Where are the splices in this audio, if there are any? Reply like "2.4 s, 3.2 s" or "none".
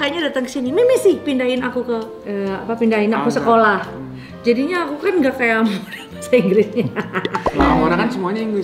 none